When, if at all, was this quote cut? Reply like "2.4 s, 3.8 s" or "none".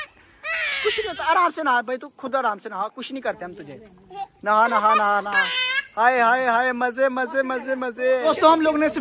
none